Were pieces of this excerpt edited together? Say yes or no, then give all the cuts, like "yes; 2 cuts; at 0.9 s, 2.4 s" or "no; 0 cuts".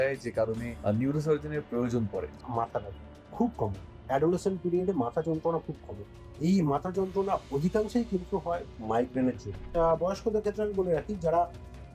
yes; 3 cuts; at 2.4 s, 8.7 s, 9.6 s